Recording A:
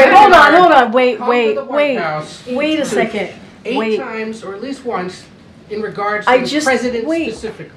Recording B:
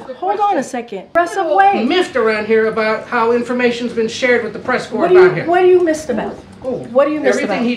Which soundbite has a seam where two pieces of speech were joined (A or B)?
B